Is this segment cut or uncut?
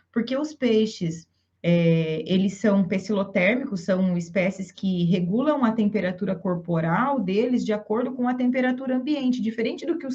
uncut